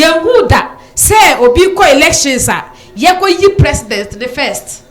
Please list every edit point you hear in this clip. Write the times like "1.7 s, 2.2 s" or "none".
none